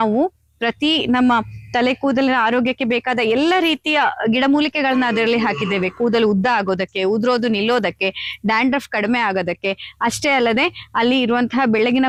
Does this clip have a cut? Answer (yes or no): no